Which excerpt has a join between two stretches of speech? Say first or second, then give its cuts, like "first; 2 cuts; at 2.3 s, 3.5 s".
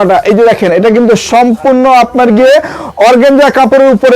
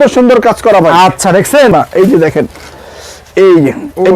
second; 1 cut; at 1.7 s